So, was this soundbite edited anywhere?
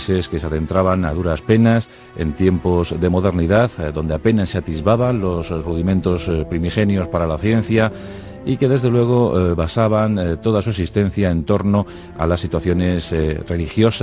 yes; 1 cut; at 2.0 s

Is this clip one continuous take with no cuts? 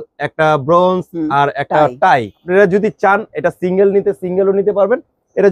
no; 1 cut; at 2.4 s

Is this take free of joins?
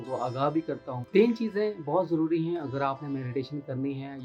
no; 1 cut; at 0.9 s

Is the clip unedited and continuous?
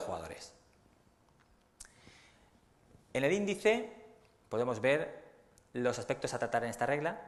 yes; 0 cuts

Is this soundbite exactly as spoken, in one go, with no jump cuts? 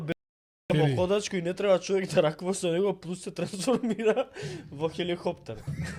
yes; 0 cuts

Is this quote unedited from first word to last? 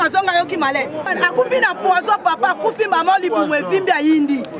no; 1 cut; at 1.1 s

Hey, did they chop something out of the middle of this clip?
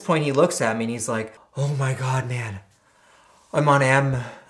yes; 1 cut; at 1.4 s

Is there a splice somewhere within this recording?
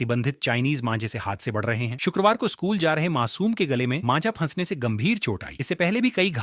no; 0 cuts

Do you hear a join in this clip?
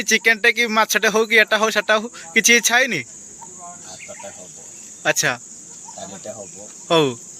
no; 0 cuts

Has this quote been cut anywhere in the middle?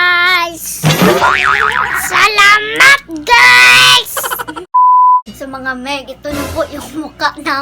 yes; 2 cuts; at 4.5 s, 5.3 s

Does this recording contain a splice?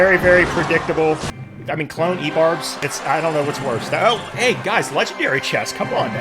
yes; 1 cut; at 1.3 s

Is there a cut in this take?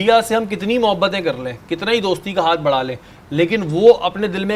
no; 0 cuts

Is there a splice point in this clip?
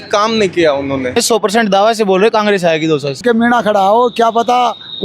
yes; 2 cuts; at 1.2 s, 3.2 s

